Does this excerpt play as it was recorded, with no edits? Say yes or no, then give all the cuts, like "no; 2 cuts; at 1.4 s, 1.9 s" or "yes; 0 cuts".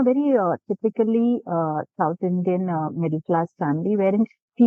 yes; 0 cuts